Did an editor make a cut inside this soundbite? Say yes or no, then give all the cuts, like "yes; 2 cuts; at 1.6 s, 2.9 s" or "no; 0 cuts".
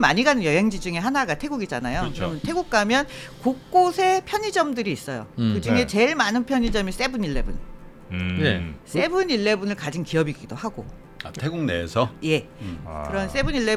no; 0 cuts